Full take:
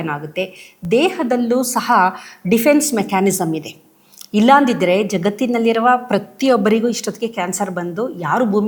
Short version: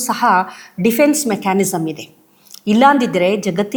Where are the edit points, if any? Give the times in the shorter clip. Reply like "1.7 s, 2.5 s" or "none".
none